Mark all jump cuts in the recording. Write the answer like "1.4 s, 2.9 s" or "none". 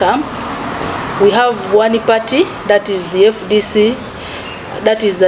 none